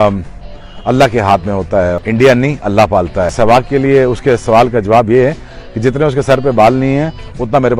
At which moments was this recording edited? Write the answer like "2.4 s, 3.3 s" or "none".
2.0 s, 3.3 s